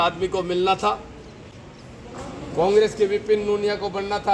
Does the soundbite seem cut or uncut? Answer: uncut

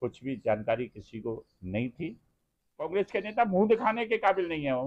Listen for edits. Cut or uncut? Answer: cut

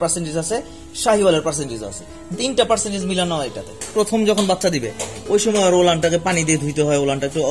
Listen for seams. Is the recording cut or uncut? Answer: cut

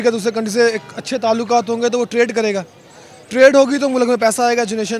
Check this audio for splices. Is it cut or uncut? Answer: uncut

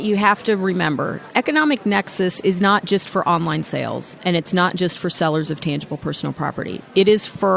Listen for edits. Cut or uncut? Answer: cut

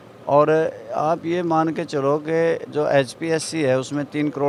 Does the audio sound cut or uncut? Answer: uncut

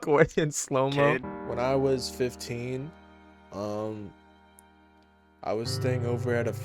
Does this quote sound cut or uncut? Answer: cut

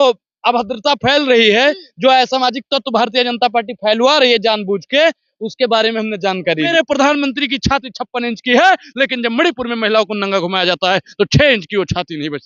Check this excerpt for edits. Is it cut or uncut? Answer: cut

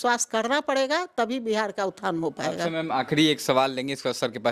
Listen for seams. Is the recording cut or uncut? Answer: uncut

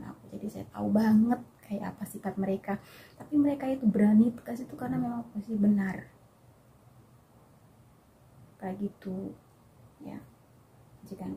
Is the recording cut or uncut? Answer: uncut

